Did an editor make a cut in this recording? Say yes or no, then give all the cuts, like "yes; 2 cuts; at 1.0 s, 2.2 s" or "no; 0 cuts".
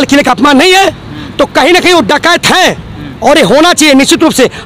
no; 0 cuts